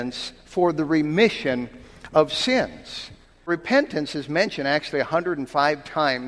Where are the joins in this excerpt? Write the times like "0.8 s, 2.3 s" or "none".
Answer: 3.4 s